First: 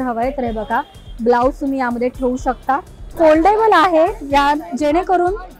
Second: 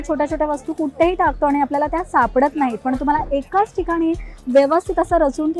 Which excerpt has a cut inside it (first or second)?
first